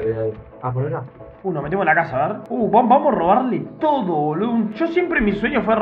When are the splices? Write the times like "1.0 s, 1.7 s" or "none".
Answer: 2.4 s